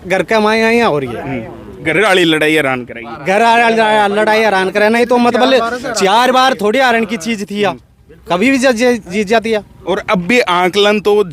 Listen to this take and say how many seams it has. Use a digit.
0